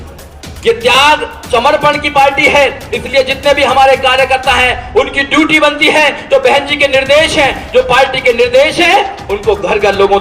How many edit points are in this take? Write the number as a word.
zero